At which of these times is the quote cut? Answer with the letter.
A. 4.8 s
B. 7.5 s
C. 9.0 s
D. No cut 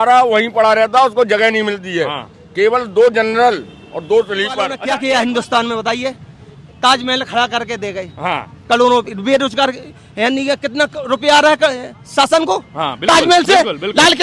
A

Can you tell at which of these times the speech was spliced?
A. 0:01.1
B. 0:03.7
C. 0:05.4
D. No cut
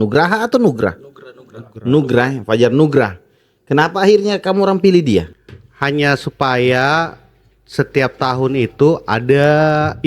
C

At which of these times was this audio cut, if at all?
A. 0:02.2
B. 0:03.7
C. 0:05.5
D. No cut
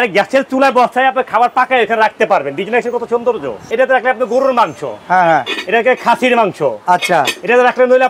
B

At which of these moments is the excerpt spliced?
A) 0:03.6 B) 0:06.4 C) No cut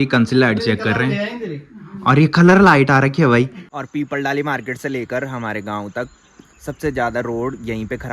A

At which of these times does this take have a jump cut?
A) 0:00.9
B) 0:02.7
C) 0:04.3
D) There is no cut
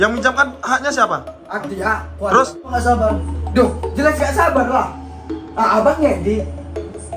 B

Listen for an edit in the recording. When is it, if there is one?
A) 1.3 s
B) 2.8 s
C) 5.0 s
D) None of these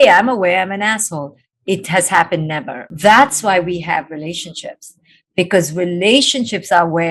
B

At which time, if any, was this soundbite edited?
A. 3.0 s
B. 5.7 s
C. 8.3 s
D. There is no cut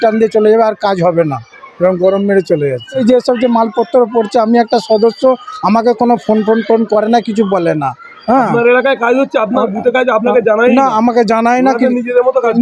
A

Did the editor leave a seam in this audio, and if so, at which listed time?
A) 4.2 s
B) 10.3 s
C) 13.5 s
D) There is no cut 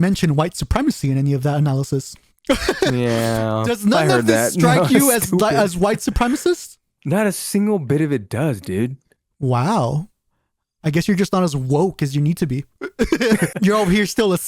C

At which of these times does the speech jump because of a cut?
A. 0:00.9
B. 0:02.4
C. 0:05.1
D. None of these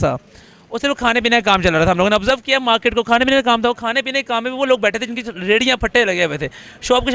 D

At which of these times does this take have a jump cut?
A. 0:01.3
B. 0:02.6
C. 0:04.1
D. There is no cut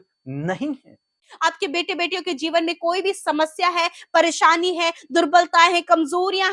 A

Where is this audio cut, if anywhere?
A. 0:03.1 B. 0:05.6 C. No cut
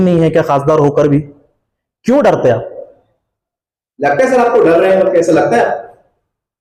C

